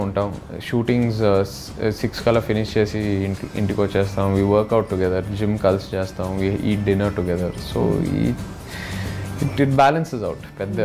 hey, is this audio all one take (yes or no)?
yes